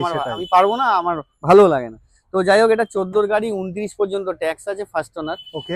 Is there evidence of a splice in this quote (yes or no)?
no